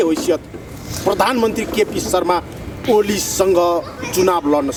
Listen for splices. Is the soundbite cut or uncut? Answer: uncut